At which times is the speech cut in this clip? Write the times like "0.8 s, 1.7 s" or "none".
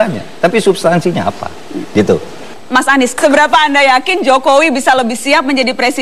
none